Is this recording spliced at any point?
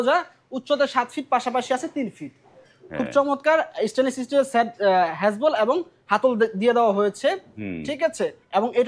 no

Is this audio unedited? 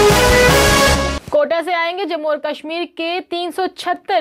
yes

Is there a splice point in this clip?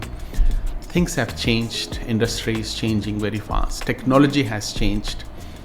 no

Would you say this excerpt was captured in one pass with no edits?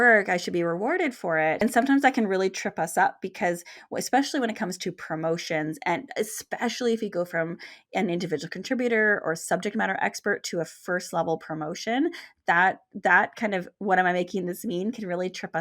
no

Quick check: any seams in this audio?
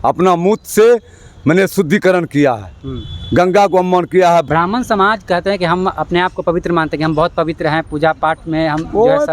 yes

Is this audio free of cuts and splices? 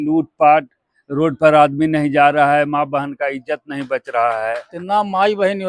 no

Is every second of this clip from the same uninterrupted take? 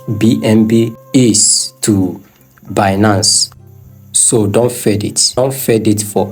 no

